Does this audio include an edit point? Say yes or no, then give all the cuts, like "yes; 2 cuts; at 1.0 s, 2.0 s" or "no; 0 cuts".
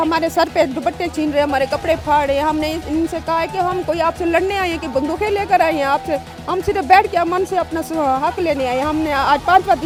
no; 0 cuts